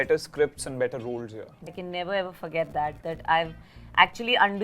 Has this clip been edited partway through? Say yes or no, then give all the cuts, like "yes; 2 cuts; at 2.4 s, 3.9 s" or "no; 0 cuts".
yes; 1 cut; at 1.7 s